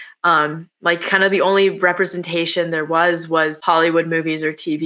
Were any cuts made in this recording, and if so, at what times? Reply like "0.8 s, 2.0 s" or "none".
3.6 s